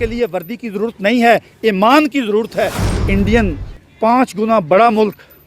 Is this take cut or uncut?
cut